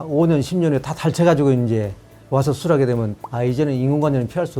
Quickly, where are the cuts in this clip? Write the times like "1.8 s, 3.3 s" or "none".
3.2 s